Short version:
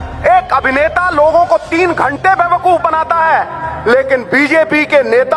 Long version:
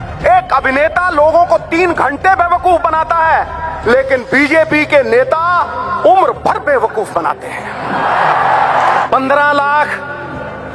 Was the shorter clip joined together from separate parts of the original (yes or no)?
no